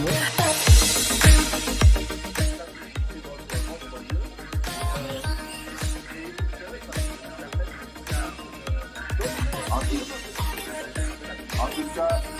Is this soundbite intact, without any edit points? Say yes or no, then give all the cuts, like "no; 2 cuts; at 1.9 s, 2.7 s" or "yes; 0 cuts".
yes; 0 cuts